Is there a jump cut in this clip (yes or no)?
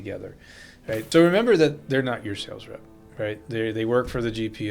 yes